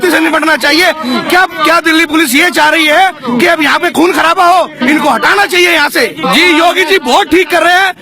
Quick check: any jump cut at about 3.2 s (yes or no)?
no